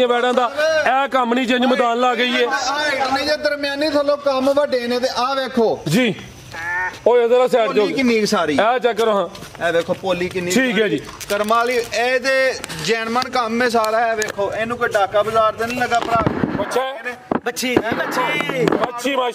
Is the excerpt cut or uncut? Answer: uncut